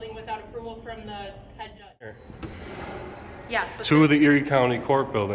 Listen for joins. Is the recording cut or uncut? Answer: cut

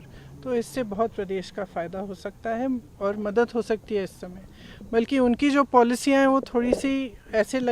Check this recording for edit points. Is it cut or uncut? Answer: uncut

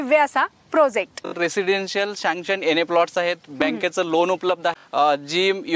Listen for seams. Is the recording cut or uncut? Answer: cut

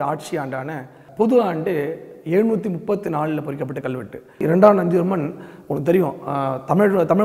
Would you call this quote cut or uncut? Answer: cut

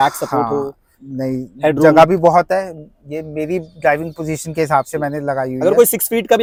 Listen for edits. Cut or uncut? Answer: uncut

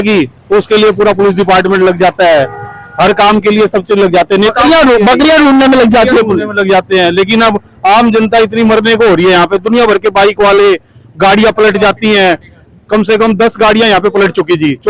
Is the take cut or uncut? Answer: uncut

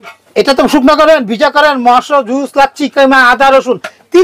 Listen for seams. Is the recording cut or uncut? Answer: uncut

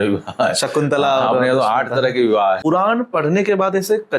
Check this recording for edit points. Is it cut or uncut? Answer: cut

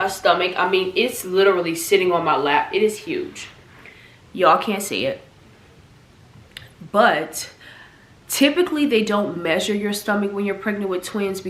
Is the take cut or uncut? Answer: uncut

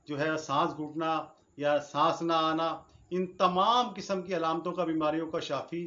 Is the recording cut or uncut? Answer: uncut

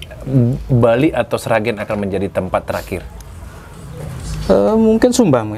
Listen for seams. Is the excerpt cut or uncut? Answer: uncut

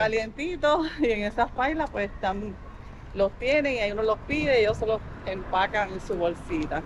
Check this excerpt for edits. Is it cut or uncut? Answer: uncut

